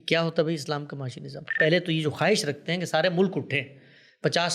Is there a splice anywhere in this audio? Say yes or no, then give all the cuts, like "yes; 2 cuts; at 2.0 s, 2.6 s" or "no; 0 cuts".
yes; 1 cut; at 1.5 s